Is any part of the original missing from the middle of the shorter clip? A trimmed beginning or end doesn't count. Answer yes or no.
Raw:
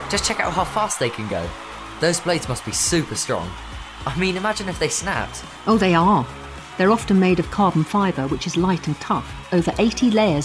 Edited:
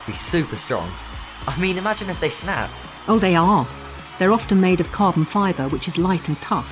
no